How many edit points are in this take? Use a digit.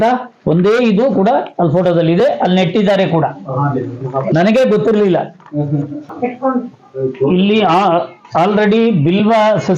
1